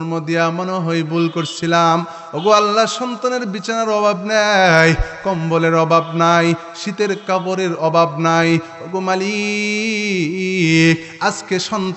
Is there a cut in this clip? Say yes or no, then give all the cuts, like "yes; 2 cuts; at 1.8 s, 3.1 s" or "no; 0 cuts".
no; 0 cuts